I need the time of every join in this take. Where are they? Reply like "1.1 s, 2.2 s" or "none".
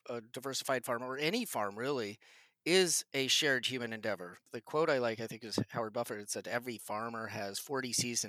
4.3 s